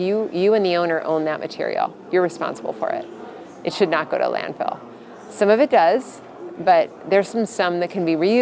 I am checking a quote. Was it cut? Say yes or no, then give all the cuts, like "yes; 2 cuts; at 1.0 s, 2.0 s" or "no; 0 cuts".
no; 0 cuts